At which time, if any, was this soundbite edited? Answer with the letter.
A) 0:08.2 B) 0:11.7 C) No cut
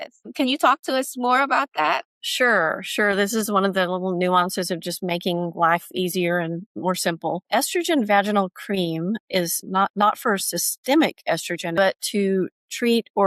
B